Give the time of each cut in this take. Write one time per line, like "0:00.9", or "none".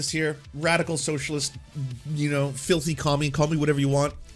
none